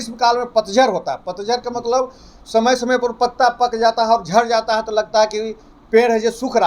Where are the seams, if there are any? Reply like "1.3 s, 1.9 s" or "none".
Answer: none